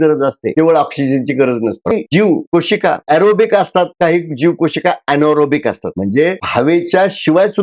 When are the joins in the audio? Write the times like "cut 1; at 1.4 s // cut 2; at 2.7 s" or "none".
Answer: cut 1; at 1.9 s